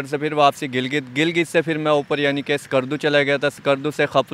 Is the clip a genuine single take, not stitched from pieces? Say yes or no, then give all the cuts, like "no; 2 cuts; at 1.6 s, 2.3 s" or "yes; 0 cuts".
yes; 0 cuts